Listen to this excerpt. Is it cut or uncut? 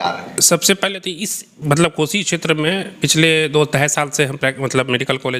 uncut